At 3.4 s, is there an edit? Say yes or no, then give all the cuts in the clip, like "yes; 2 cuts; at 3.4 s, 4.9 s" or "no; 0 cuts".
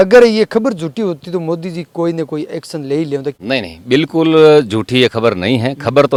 no; 0 cuts